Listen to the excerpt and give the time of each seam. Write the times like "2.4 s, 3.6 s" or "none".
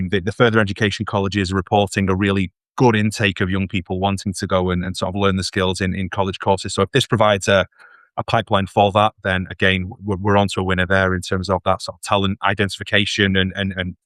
none